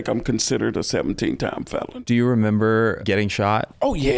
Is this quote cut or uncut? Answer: cut